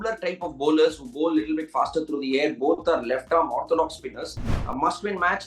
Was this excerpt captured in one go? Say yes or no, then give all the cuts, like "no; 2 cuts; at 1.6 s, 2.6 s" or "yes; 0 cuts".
no; 1 cut; at 4.5 s